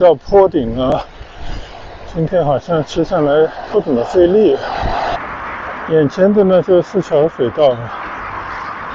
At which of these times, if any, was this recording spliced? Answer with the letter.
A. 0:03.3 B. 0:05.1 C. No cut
B